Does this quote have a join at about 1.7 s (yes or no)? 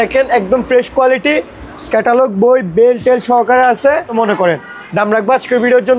no